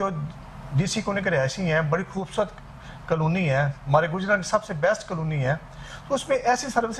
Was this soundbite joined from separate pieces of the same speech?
no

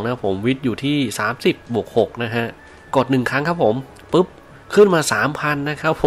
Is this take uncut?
yes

